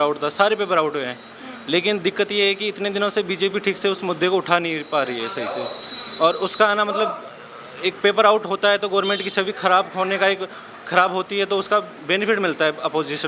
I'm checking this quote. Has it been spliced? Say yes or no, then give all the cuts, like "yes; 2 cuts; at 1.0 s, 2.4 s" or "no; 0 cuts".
no; 0 cuts